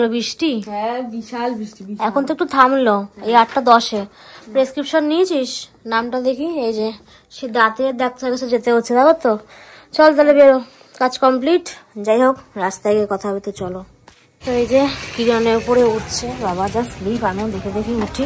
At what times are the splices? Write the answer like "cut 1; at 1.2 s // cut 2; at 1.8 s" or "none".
none